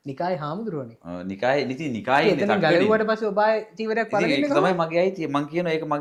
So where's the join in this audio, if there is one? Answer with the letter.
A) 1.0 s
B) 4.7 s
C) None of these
C